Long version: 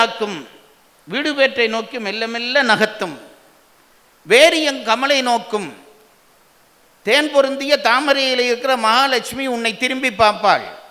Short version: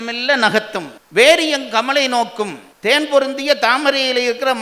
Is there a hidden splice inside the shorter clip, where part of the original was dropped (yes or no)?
yes